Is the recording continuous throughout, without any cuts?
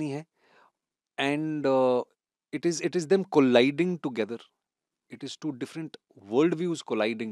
yes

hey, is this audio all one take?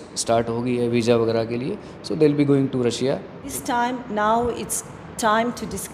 no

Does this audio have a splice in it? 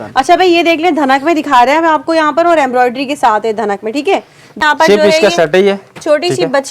yes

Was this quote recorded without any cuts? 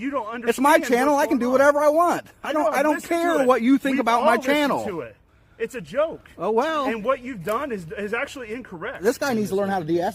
yes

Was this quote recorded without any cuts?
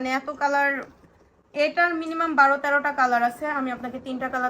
yes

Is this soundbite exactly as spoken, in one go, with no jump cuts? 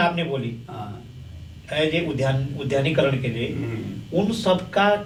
yes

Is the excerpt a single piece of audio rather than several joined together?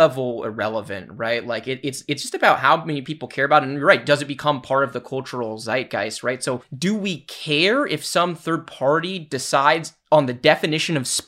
no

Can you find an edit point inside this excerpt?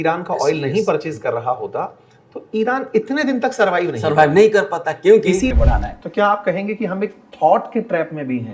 yes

